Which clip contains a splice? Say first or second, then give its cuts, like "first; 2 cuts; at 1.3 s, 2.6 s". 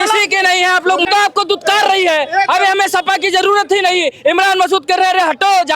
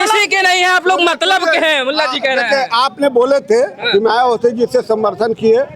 first; 1 cut; at 1.1 s